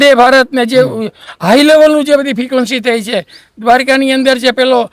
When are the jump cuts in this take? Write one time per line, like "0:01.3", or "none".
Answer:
none